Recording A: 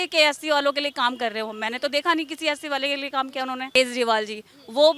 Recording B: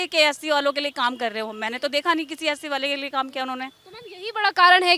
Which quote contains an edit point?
A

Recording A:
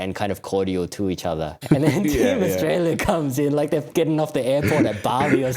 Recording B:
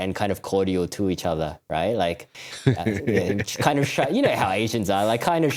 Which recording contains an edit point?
A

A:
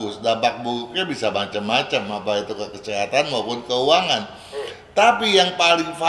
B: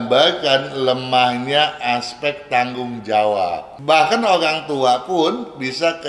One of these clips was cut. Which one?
B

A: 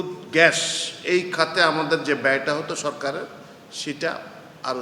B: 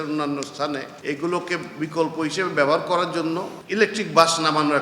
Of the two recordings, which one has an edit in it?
B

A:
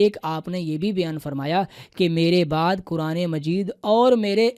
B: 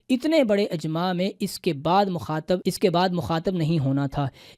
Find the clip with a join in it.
B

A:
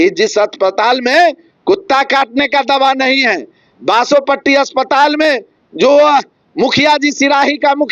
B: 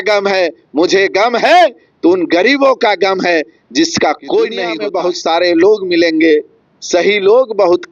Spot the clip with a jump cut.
B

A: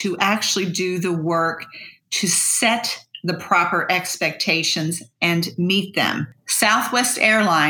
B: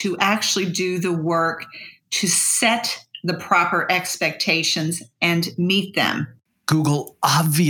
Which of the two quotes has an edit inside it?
B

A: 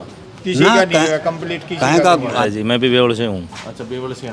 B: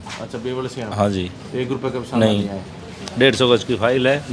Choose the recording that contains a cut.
A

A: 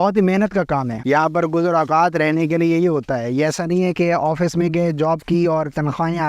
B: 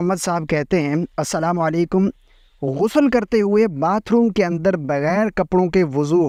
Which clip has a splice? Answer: A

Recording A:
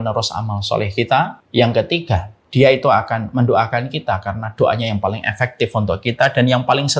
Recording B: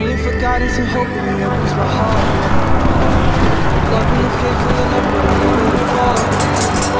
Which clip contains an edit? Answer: A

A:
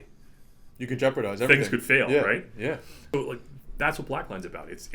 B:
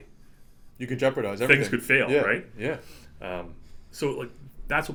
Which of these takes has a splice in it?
A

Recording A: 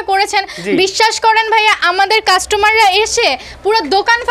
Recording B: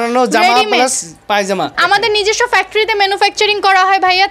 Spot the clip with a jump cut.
B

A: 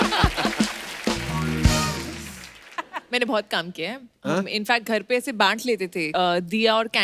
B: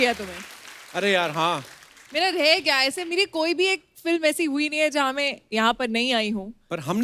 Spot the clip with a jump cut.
A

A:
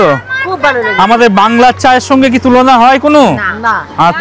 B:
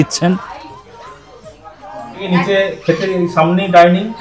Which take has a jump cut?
B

